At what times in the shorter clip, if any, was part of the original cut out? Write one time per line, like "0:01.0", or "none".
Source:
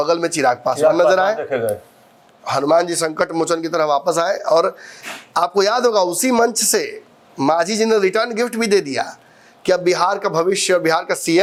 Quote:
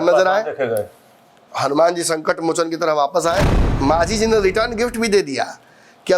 0:03.5